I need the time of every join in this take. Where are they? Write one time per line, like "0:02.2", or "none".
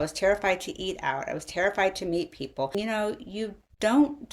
0:02.8